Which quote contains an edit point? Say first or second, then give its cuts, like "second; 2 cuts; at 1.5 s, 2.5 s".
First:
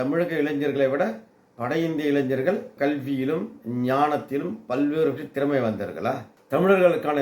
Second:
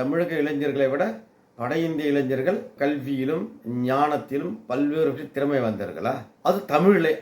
first; 1 cut; at 6.3 s